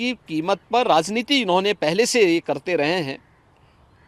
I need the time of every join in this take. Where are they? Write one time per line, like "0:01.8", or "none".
none